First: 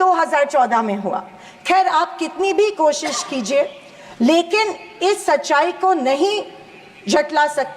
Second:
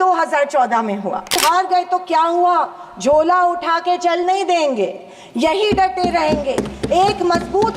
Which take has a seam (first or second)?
second